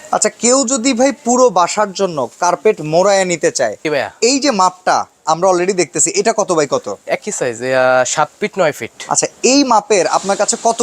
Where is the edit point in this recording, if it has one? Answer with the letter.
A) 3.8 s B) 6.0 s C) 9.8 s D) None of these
A